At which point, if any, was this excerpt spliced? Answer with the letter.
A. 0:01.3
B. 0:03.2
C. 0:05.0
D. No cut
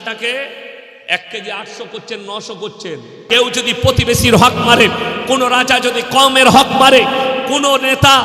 B